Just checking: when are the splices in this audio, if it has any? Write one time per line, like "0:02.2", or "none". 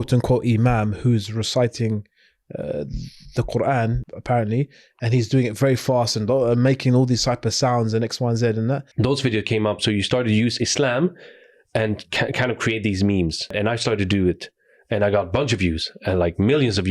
0:04.0
0:08.9
0:13.5